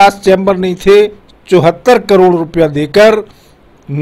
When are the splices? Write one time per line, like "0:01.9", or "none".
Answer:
0:01.3